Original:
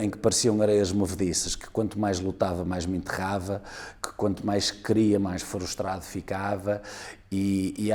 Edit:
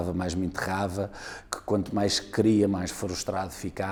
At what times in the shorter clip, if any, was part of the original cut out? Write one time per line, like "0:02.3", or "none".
none